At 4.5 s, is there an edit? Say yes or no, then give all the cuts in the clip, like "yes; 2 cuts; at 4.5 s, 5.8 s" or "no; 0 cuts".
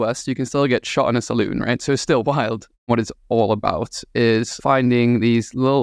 yes; 2 cuts; at 2.9 s, 4.5 s